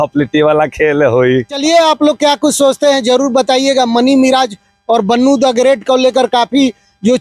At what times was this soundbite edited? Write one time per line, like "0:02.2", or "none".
none